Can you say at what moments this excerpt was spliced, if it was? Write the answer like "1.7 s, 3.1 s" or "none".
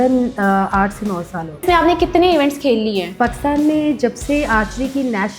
1.6 s, 3.2 s